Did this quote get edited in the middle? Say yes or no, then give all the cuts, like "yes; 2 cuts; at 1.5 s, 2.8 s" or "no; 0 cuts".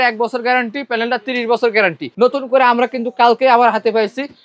yes; 1 cut; at 2.0 s